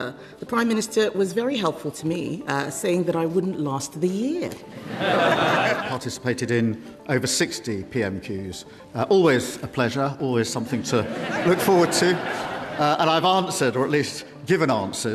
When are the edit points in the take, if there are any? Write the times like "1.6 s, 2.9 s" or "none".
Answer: 5.8 s